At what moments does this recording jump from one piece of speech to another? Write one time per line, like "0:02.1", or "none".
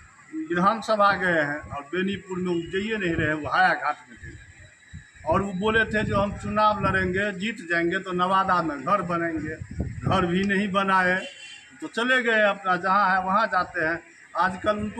none